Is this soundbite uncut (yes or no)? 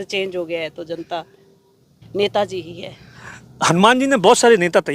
no